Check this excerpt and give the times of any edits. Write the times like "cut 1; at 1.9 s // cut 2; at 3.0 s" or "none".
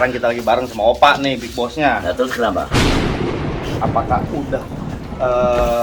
cut 1; at 2.7 s // cut 2; at 3.8 s